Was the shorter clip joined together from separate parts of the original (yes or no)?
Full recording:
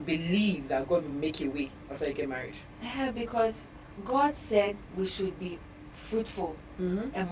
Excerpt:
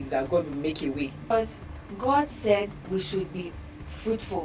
yes